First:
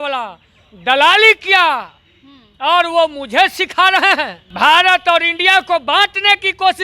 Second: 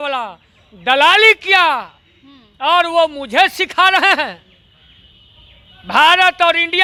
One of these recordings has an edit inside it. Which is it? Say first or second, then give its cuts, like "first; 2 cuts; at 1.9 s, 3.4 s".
first; 1 cut; at 4.4 s